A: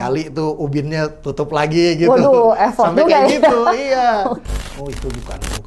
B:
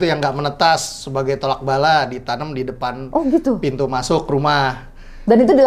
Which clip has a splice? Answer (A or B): A